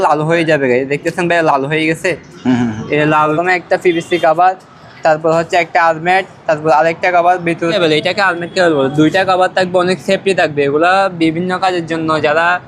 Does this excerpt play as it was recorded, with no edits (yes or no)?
no